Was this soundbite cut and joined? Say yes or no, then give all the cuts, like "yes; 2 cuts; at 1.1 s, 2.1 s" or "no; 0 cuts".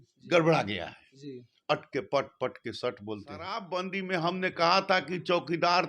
yes; 1 cut; at 3.6 s